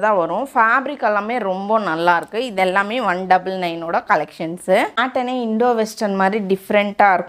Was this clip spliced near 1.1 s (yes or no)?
no